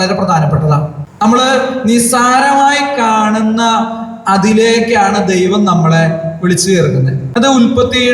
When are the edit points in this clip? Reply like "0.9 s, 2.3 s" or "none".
1.0 s, 7.2 s